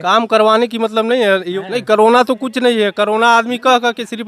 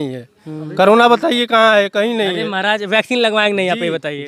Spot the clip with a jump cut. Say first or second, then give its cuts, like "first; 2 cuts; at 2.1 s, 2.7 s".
first; 1 cut; at 1.6 s